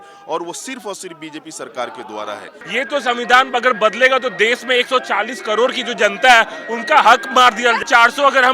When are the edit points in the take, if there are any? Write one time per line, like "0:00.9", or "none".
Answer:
0:02.6
0:07.8